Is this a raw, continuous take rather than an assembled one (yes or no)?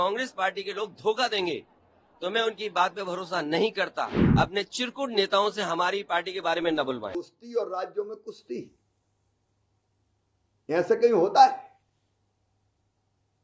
no